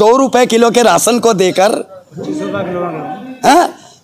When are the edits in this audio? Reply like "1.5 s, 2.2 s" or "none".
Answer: none

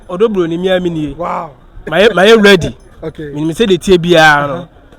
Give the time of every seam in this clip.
1.9 s

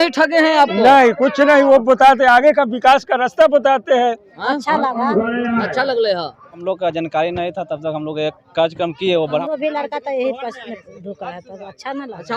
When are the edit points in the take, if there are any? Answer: 4.3 s, 6.6 s, 9.4 s

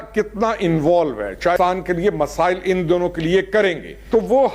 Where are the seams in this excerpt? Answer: 1.6 s

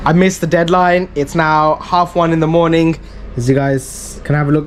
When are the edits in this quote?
none

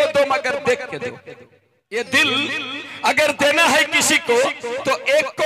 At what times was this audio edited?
none

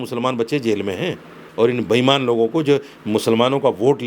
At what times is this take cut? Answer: 1.4 s

